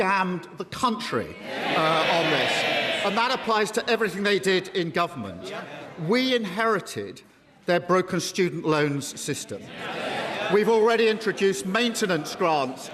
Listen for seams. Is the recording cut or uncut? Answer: uncut